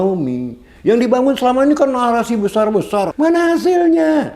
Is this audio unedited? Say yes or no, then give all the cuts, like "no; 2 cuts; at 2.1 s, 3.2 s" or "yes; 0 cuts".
no; 1 cut; at 3.1 s